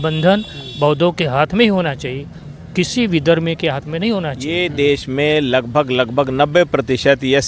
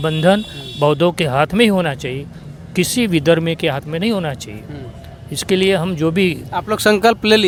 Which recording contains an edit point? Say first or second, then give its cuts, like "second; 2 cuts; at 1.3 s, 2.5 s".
first; 1 cut; at 4.4 s